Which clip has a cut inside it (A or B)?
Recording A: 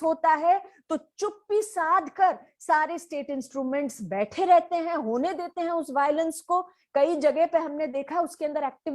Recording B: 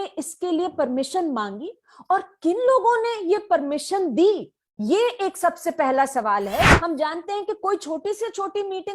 B